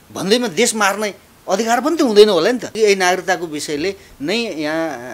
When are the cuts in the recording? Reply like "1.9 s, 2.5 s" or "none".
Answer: 2.8 s

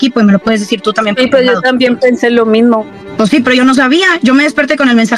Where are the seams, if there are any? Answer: 3.0 s

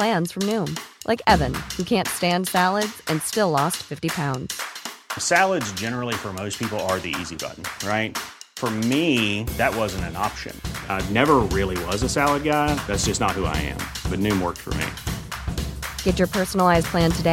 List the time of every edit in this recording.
none

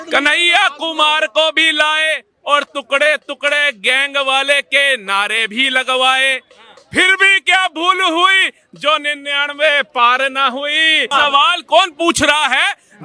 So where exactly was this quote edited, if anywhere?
11.1 s

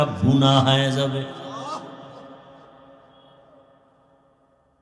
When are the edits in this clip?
none

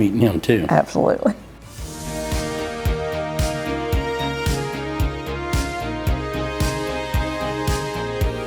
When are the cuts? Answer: 1.5 s

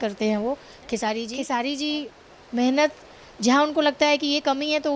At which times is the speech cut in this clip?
1.3 s

